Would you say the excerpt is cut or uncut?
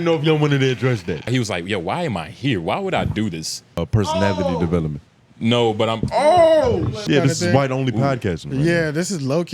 cut